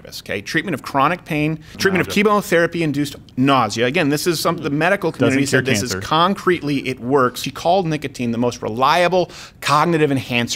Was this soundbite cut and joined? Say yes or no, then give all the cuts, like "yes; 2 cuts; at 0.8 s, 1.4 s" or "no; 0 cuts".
yes; 2 cuts; at 1.7 s, 7.5 s